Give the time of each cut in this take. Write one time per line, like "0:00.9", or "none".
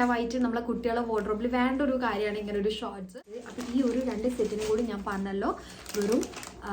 0:03.1